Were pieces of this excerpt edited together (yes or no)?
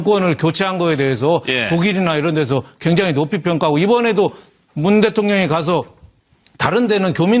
yes